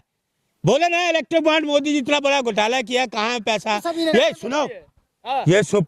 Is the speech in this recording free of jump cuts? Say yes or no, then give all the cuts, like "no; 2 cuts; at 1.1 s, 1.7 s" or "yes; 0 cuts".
no; 1 cut; at 4.1 s